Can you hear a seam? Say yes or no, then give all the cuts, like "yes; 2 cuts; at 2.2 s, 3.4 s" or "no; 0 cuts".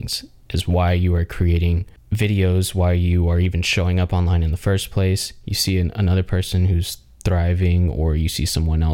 no; 0 cuts